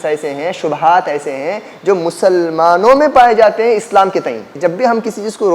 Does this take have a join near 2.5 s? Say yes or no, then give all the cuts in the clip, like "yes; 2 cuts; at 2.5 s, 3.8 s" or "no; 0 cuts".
no; 1 cut; at 4.5 s